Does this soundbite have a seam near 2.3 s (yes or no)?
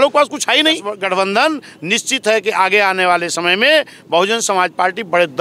no